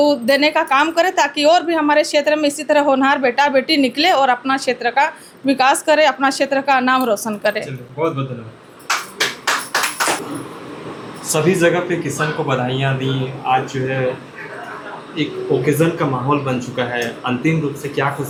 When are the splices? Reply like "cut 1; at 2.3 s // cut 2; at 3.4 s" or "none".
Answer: none

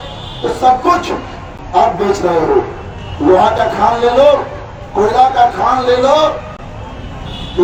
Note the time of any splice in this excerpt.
none

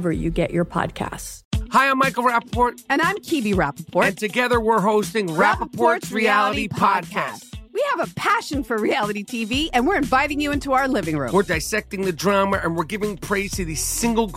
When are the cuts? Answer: cut 1; at 1.3 s

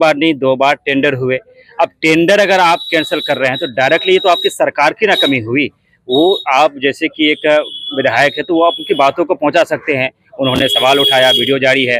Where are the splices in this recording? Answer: none

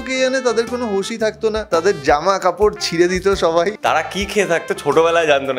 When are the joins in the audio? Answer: cut 1; at 1.7 s // cut 2; at 3.8 s

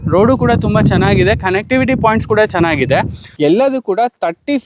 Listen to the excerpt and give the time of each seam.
cut 1; at 3.2 s

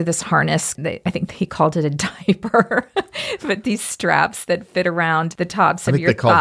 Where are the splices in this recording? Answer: cut 1; at 5.4 s

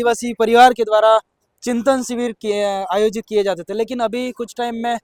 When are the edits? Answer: none

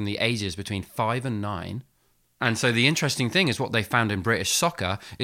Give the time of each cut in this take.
cut 1; at 2.4 s

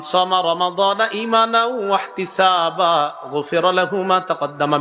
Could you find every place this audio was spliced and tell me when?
none

